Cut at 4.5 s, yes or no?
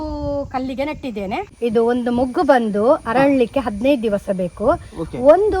no